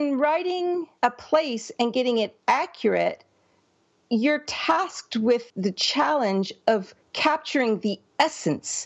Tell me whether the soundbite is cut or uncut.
cut